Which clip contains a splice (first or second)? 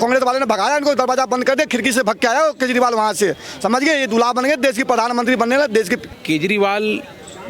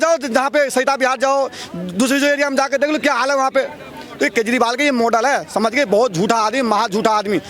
first